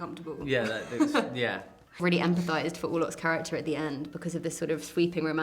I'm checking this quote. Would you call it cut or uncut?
cut